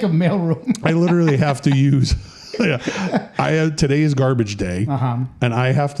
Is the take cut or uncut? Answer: uncut